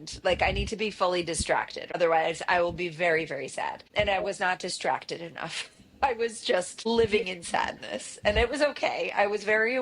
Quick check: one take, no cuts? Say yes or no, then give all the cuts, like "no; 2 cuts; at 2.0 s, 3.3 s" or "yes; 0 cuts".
no; 3 cuts; at 1.9 s, 3.8 s, 6.9 s